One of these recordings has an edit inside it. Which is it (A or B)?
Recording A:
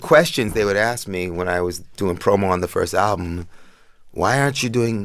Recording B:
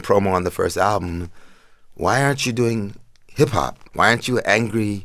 B